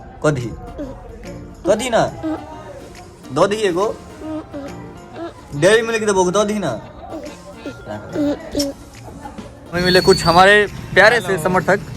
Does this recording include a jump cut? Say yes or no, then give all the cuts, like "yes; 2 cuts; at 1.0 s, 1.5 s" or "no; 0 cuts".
yes; 1 cut; at 9.7 s